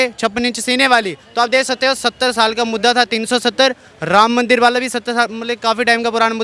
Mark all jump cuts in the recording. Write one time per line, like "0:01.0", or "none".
none